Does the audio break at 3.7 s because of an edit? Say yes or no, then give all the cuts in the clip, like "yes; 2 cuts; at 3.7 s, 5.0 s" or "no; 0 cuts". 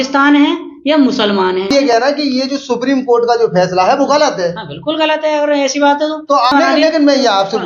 no; 2 cuts; at 2.0 s, 6.5 s